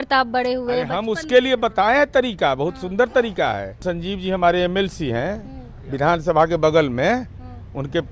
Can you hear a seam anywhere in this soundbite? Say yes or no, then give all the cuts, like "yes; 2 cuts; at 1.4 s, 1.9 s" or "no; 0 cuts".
yes; 1 cut; at 3.8 s